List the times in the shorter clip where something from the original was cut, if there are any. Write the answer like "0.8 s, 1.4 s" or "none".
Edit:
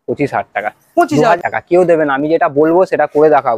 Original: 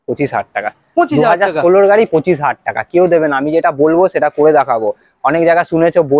1.4 s